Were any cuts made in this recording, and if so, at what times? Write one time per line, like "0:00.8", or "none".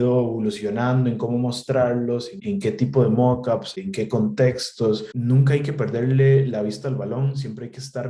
0:02.3
0:03.8
0:05.1

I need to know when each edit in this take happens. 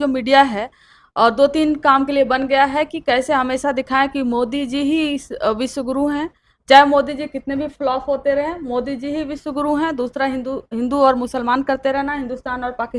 none

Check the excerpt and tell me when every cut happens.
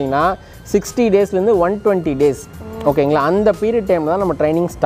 none

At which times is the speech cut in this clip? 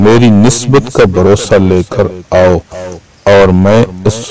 none

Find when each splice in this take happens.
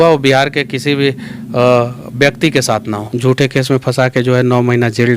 0:03.0

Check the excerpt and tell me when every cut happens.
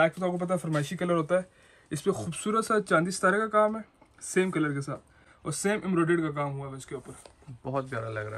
none

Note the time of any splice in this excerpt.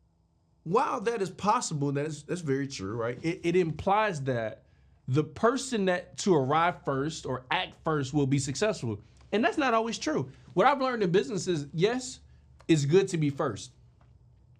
none

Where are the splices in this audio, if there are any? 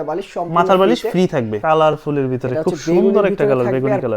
0:01.6

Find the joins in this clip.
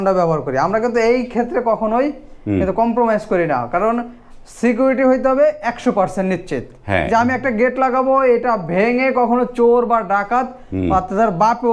none

